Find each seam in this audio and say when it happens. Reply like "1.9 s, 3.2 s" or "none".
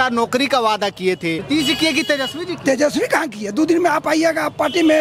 1.4 s